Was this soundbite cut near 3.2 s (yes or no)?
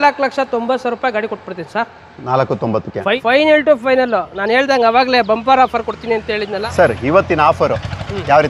yes